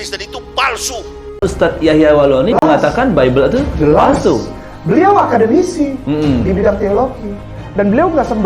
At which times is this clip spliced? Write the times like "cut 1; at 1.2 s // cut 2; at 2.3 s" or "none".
cut 1; at 1.2 s